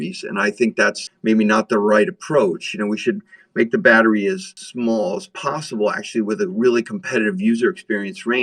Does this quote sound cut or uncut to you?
uncut